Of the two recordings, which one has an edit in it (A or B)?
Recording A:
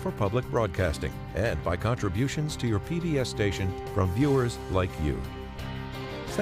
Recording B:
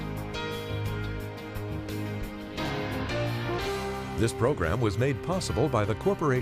B